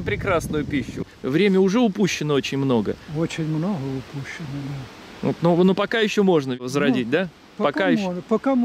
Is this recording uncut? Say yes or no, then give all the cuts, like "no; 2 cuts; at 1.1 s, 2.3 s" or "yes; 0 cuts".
no; 2 cuts; at 1.1 s, 6.6 s